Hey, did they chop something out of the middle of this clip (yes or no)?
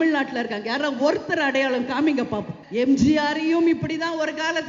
yes